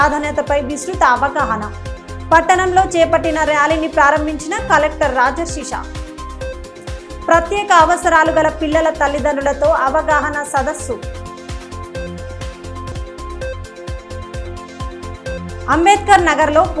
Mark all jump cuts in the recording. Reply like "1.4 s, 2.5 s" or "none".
none